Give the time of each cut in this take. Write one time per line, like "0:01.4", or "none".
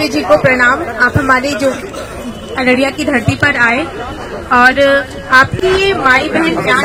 none